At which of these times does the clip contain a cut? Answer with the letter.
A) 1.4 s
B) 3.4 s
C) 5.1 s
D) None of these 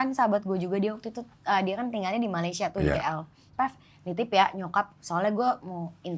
B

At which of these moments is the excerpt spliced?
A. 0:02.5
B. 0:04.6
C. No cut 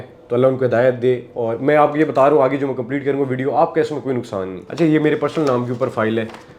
B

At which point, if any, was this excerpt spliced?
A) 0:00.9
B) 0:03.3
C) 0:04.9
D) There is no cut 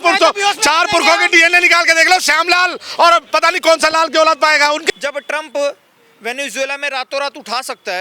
C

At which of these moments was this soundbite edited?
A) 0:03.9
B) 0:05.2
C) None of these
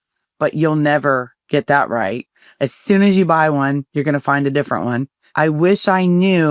B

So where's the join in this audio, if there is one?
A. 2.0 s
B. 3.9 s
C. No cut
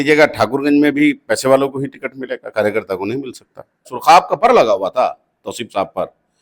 B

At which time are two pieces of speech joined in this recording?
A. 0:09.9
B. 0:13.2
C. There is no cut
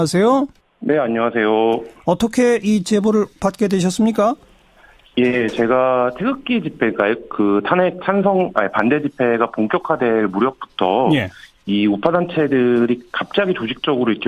A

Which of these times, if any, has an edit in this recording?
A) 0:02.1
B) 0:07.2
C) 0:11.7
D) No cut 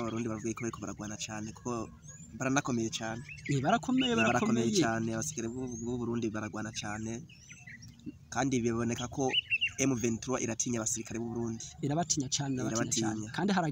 D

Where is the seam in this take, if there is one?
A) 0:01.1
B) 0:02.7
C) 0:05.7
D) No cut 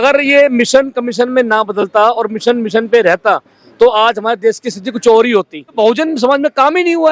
C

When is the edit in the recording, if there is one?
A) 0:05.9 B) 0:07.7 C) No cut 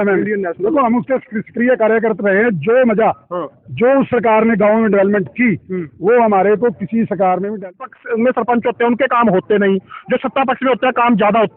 B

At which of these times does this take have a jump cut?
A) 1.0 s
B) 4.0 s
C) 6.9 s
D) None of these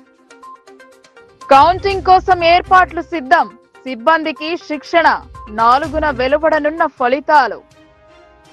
A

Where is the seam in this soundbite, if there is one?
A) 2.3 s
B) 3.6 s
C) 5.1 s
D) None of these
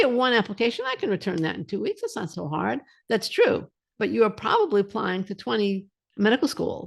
A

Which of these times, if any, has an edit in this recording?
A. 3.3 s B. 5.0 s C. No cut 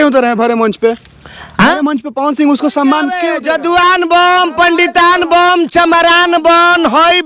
A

